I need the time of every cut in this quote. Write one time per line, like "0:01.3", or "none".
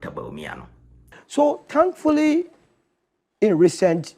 0:01.2